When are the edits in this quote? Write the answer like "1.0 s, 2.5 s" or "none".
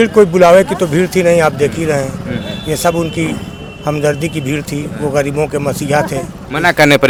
none